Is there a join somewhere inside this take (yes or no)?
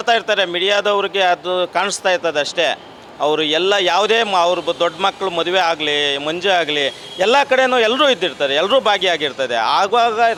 no